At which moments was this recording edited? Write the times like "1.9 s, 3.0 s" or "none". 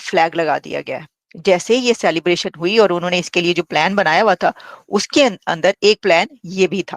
none